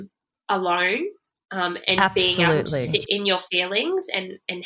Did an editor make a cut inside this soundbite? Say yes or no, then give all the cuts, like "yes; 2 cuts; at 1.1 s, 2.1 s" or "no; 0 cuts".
no; 0 cuts